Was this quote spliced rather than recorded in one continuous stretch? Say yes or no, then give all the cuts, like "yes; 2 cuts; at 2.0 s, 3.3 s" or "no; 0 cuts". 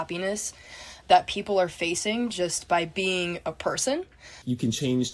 yes; 2 cuts; at 1.0 s, 4.3 s